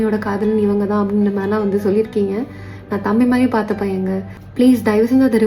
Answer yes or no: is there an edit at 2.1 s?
no